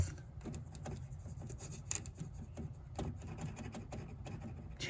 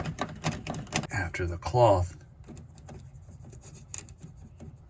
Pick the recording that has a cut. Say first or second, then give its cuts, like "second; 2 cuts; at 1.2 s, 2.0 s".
second; 1 cut; at 1.1 s